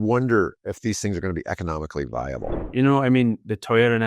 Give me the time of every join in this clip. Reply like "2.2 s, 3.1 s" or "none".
2.6 s